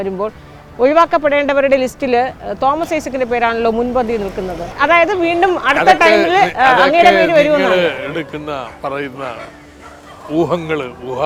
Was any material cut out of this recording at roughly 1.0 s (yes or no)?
no